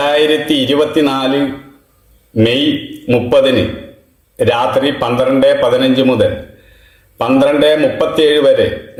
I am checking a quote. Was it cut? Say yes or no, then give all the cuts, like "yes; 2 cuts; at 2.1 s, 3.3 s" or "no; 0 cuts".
no; 0 cuts